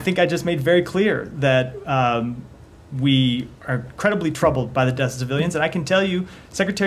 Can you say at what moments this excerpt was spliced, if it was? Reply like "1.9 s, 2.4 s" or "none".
none